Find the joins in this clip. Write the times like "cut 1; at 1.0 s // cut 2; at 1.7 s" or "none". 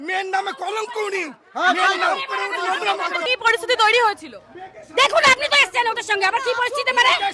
cut 1; at 3.3 s